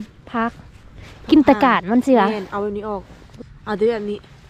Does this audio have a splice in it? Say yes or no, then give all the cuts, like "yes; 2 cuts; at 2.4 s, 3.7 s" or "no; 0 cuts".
yes; 1 cut; at 3.2 s